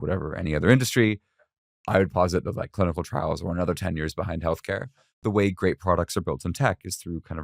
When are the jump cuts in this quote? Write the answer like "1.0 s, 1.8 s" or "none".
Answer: 5.2 s